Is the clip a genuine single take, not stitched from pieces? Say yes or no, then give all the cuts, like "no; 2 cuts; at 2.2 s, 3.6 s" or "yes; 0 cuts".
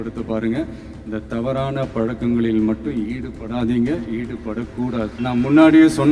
no; 1 cut; at 5.1 s